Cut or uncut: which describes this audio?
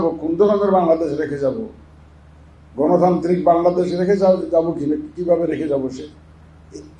uncut